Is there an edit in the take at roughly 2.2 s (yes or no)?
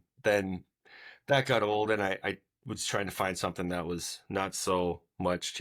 no